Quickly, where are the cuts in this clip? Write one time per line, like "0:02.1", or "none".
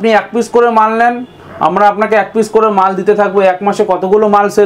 none